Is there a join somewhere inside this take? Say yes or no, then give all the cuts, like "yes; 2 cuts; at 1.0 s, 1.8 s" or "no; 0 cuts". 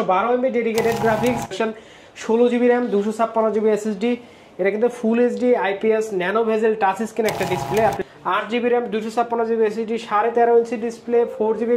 yes; 2 cuts; at 1.5 s, 8.0 s